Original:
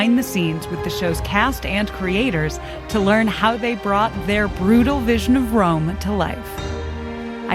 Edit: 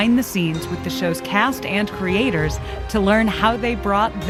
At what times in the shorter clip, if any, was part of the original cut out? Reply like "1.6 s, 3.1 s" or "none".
none